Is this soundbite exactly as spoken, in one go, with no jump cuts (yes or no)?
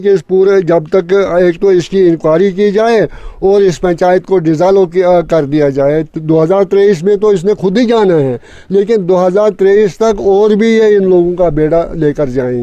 yes